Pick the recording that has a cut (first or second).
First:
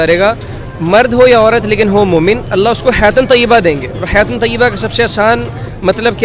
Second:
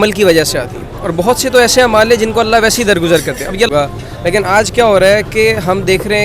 second